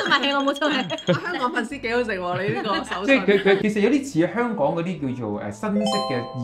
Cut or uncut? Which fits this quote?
cut